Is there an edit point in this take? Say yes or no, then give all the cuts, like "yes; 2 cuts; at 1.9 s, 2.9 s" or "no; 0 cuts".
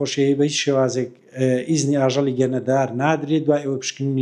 no; 0 cuts